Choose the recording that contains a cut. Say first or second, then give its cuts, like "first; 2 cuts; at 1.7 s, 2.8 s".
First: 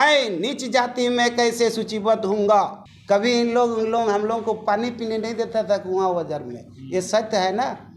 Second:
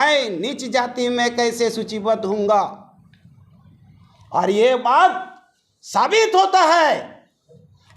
first; 1 cut; at 2.9 s